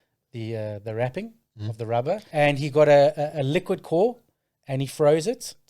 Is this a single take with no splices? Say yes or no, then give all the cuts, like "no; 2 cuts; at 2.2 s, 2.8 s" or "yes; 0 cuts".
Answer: no; 1 cut; at 2.2 s